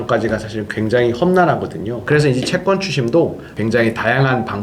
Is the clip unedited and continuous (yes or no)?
no